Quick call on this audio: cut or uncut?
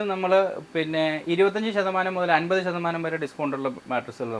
uncut